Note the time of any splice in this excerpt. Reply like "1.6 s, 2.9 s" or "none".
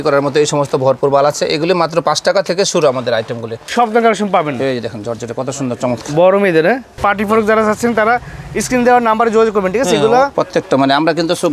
3.6 s, 7.0 s, 10.3 s